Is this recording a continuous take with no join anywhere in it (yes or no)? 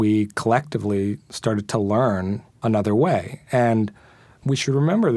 no